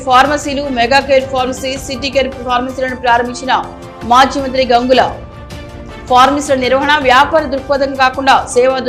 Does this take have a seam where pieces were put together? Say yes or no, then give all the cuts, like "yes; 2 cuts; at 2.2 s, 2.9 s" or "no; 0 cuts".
no; 0 cuts